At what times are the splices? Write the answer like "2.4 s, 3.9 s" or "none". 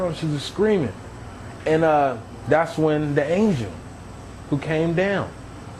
none